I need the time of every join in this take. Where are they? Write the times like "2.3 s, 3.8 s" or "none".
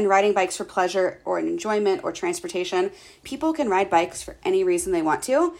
3.1 s